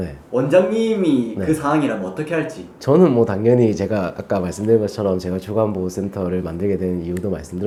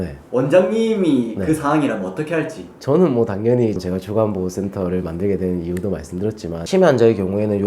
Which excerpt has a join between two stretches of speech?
second; 2 cuts; at 3.8 s, 6.6 s

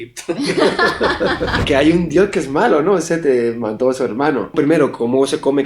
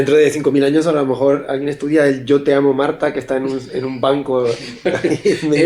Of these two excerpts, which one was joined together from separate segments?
first; 2 cuts; at 1.6 s, 4.5 s

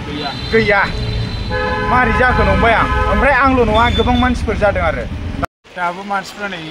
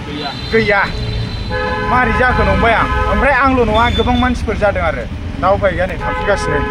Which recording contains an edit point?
first; 1 cut; at 5.4 s

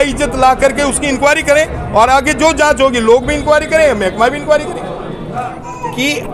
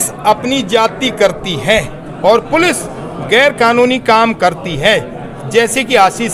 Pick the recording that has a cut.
first; 1 cut; at 5.3 s

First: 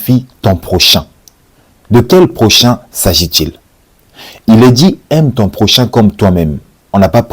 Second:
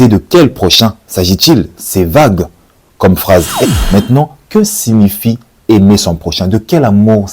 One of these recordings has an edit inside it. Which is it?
second; 1 cut; at 3.6 s

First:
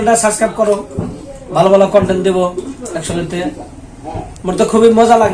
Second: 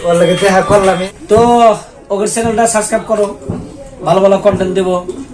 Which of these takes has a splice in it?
second; 1 cut; at 1.1 s

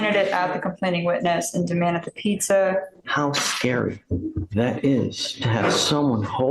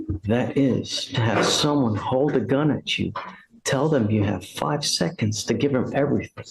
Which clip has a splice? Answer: first; 1 cut; at 3.0 s

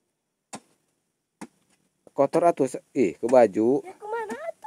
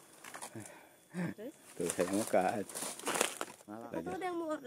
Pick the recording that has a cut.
second; 1 cut; at 3.5 s

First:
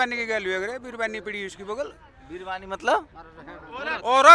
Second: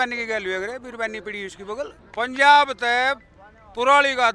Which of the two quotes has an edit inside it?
second; 1 cut; at 2.0 s

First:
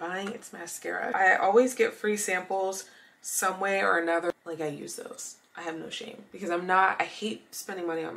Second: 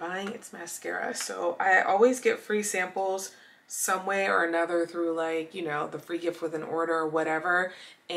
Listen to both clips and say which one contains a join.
first; 2 cuts; at 1.1 s, 4.3 s

